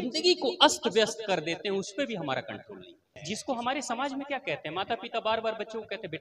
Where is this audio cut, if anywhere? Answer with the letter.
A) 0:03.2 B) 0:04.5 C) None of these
A